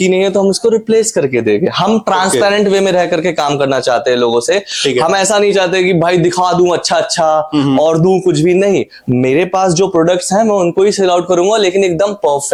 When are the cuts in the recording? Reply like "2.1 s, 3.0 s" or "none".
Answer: none